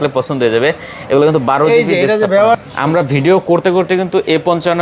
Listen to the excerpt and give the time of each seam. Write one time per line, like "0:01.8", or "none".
0:02.6